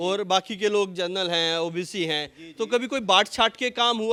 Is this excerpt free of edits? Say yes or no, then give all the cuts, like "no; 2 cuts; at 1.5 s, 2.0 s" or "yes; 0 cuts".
yes; 0 cuts